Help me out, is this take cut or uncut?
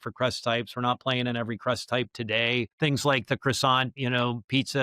cut